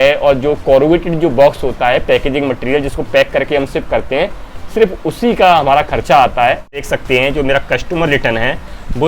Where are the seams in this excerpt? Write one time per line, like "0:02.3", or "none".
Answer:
0:06.9

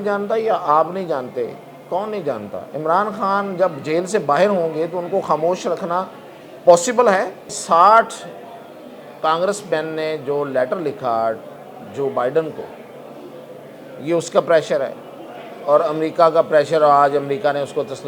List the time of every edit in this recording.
0:07.5

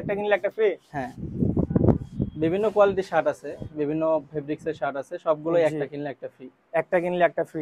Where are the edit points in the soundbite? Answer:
none

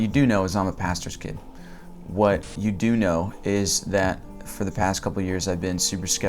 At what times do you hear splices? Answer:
0:02.5

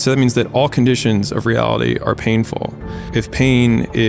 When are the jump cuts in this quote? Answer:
0:03.1

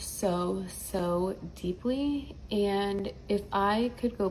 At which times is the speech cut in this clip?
none

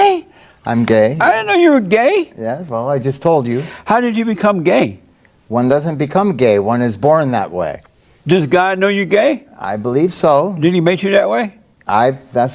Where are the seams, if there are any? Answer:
none

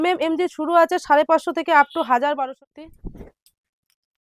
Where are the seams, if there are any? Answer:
0:02.5

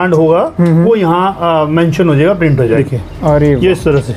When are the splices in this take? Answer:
0:02.8

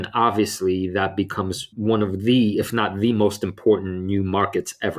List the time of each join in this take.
0:01.7

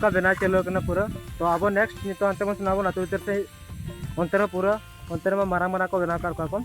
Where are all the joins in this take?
none

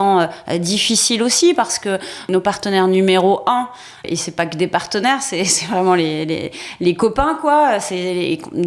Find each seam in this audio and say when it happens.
0:02.2
0:04.0

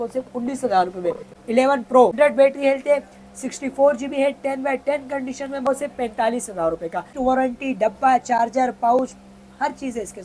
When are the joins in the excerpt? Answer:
0:01.3
0:02.1
0:05.7
0:07.1

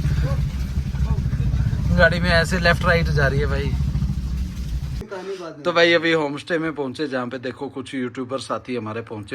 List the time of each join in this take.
0:05.1

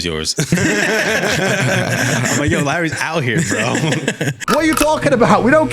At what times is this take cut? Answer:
0:04.4

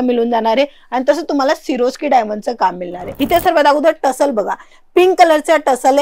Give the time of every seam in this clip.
0:03.1

